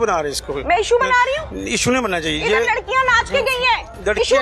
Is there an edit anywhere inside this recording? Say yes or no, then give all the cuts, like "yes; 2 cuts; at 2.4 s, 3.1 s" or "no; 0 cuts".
no; 0 cuts